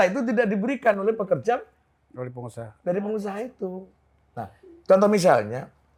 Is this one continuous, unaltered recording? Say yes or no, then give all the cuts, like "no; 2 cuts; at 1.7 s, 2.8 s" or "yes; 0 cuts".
yes; 0 cuts